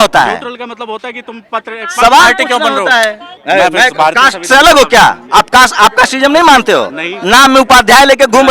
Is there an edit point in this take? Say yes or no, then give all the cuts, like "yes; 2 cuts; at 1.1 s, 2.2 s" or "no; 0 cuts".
yes; 1 cut; at 3.3 s